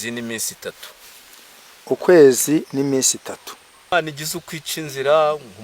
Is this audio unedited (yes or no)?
no